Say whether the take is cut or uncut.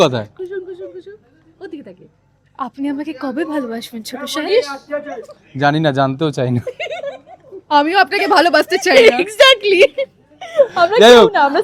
uncut